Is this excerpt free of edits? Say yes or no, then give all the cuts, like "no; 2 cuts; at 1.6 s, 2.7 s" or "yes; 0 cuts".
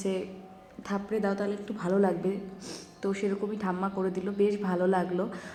yes; 0 cuts